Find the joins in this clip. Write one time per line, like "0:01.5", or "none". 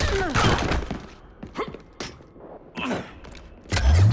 none